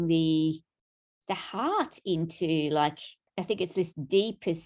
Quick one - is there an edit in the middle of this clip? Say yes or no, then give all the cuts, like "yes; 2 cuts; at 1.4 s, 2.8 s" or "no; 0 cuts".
yes; 1 cut; at 3.3 s